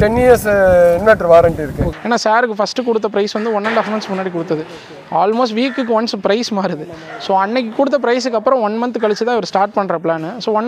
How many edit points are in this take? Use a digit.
1